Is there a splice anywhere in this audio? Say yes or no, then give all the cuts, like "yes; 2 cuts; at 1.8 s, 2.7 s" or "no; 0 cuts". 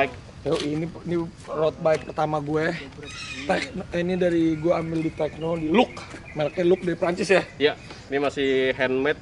yes; 1 cut; at 7.9 s